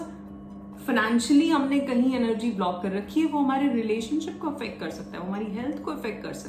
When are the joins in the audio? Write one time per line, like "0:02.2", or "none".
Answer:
none